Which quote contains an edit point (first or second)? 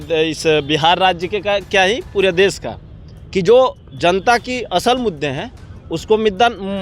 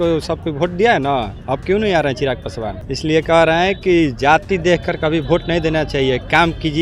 second